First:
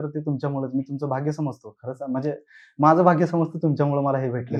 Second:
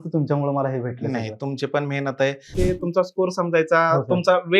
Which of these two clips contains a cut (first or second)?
second